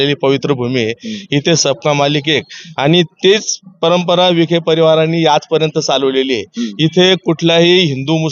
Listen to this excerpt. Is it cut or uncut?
uncut